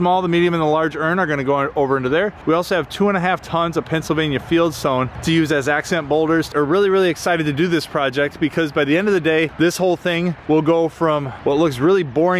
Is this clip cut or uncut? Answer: cut